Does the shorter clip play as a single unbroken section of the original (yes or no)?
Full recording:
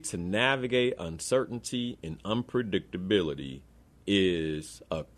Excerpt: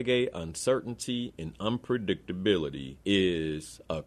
no